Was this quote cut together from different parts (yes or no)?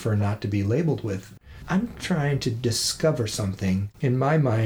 yes